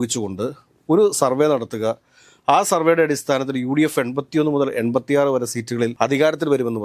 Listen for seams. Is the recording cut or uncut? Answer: uncut